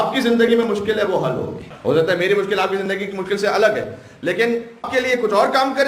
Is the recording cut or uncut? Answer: cut